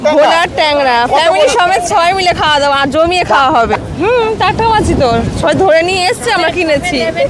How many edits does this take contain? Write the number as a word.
one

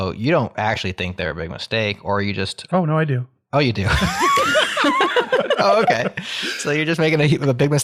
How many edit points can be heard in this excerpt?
zero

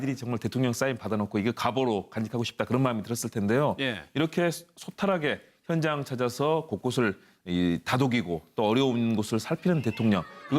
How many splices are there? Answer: one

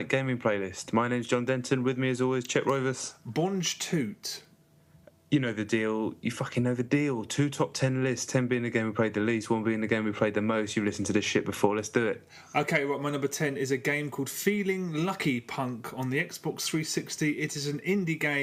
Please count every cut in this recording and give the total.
zero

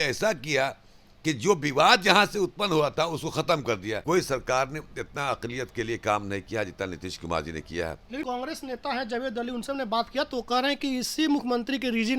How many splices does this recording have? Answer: two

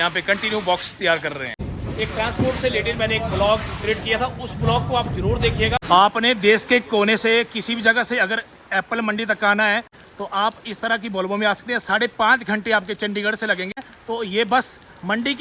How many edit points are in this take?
four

